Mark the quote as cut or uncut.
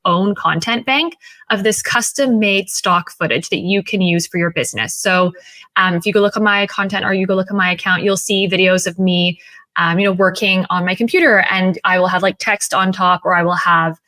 uncut